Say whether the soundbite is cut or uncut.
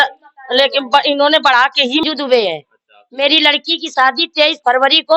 cut